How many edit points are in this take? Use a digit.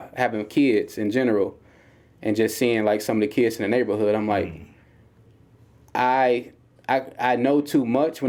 0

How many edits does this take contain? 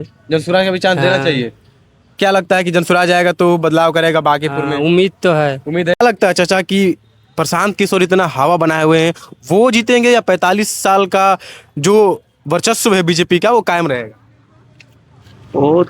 1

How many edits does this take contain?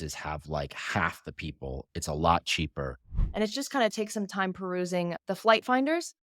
1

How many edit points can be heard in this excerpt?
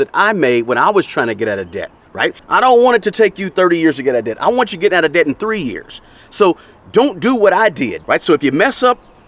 0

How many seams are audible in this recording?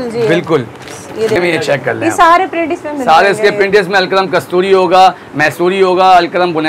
1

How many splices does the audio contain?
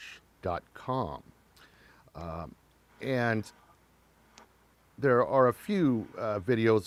0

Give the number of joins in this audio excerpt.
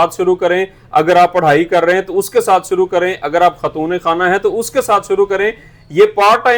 0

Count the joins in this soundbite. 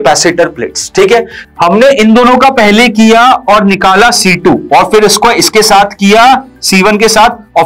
1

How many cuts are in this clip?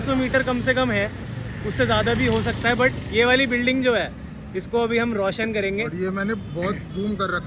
0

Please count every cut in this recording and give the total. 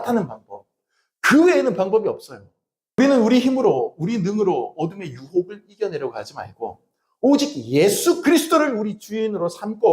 1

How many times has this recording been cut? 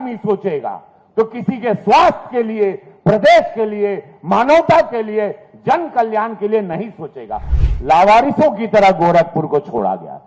1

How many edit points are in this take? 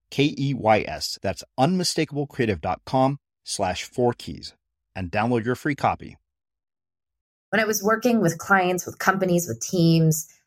1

